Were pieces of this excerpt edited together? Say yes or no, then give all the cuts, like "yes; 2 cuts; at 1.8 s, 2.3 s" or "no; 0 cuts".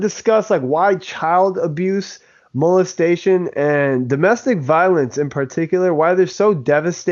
no; 0 cuts